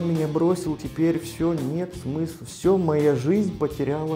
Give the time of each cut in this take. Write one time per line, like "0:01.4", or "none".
none